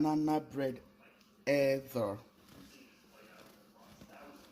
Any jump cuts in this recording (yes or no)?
no